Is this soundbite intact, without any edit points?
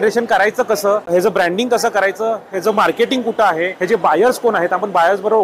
no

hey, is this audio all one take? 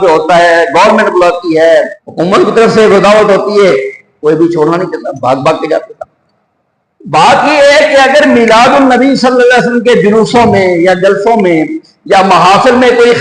no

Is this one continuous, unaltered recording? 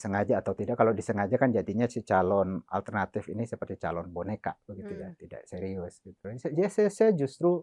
no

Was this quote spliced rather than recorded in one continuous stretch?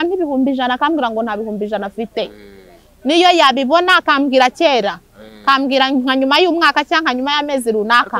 no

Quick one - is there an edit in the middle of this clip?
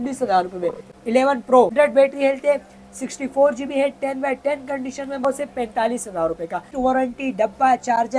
yes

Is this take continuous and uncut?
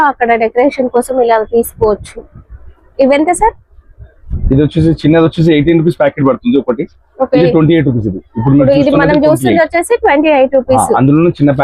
yes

